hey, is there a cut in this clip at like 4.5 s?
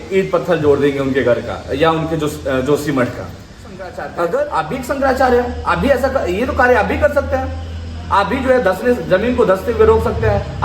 yes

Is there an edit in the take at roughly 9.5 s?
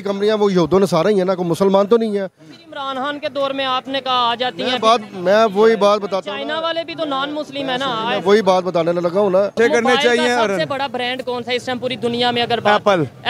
yes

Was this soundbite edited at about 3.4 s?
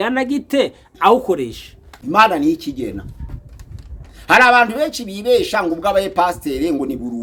no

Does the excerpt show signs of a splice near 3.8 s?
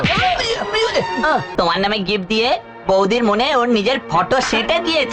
no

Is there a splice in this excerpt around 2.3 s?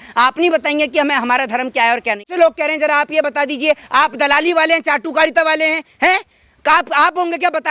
yes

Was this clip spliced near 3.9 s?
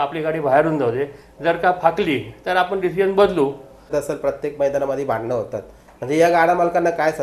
yes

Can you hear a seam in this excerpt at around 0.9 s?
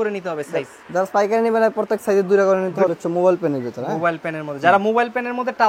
no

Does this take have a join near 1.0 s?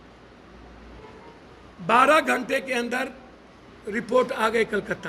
yes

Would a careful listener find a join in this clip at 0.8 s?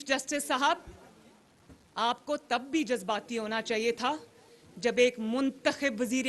no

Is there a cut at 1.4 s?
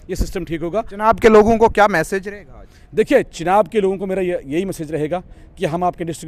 no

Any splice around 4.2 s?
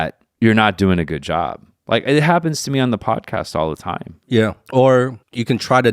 yes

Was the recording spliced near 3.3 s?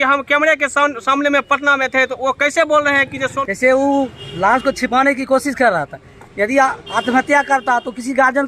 yes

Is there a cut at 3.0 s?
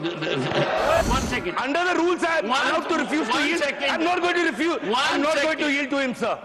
no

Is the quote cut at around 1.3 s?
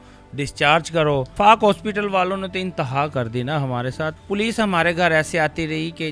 yes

